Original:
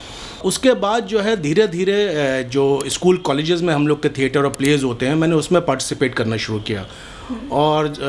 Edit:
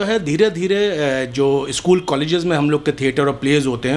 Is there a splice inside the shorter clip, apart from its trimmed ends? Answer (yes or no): no